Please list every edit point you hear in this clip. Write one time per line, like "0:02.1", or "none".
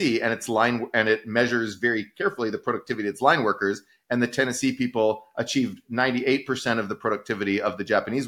none

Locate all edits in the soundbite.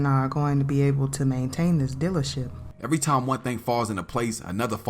0:02.7

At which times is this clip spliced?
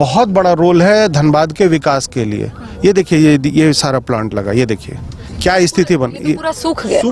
none

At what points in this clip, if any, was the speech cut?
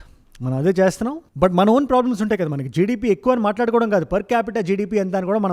none

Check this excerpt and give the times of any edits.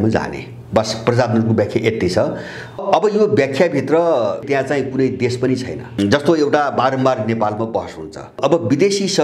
0:02.8
0:04.4
0:06.0
0:08.3

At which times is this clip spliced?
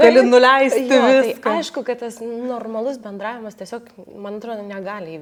none

